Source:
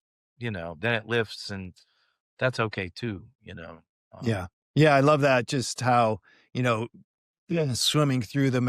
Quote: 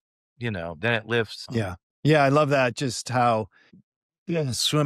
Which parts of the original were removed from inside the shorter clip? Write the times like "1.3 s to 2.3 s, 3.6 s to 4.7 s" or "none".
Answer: 1.4 s to 4.1 s, 6.4 s to 6.9 s